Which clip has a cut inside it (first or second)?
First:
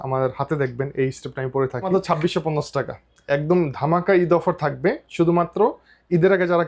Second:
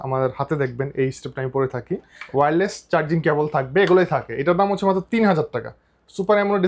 first